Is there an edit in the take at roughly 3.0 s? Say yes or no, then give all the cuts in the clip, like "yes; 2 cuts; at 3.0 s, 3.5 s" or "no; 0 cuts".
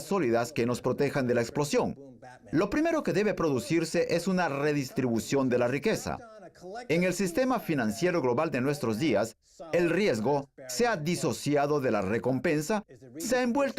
yes; 1 cut; at 3.0 s